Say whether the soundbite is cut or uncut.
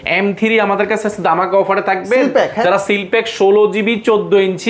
uncut